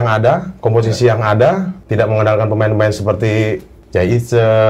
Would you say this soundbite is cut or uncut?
cut